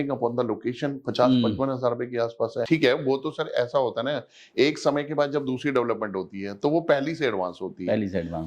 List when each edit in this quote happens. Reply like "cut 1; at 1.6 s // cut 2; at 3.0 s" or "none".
cut 1; at 2.6 s